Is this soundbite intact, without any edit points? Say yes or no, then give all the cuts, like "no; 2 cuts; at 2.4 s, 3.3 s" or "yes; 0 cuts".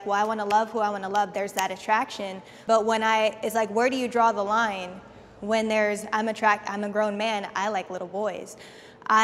yes; 0 cuts